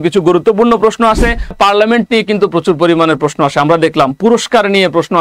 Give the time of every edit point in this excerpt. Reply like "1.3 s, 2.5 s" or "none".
1.5 s